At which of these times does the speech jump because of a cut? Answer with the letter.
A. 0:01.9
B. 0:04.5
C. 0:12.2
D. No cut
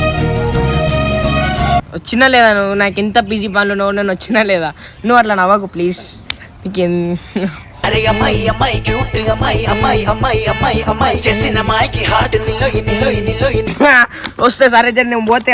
A